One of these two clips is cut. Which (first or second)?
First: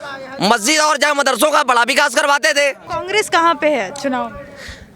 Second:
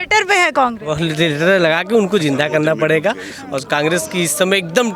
first